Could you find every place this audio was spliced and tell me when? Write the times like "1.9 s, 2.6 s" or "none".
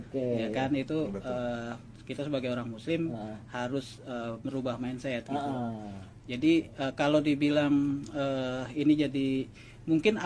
none